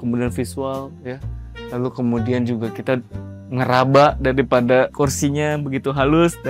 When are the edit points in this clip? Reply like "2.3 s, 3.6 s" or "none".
none

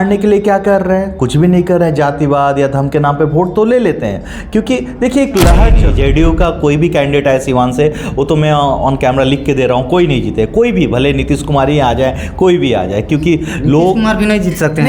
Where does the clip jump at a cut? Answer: 5.7 s

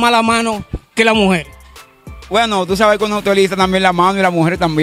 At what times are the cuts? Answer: none

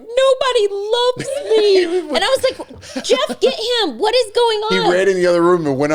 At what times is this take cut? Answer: none

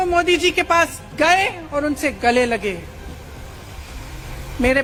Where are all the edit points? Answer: none

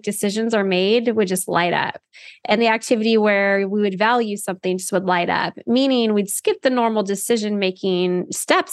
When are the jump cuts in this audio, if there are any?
none

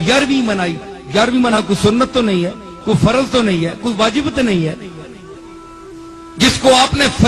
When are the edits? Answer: 1.6 s

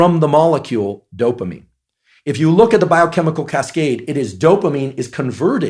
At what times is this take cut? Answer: none

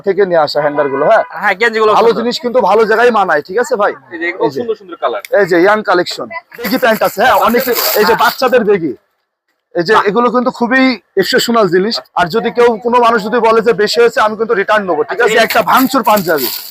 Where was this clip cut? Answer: 6.7 s, 12.0 s, 15.3 s

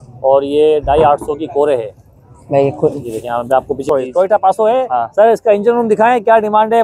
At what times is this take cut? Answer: 3.8 s

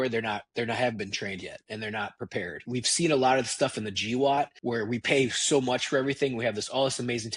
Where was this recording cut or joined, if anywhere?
2.6 s, 4.6 s

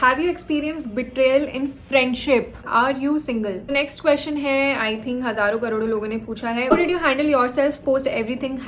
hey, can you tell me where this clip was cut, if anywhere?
2.6 s, 3.7 s, 6.7 s

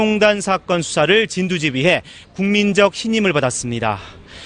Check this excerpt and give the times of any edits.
1.2 s

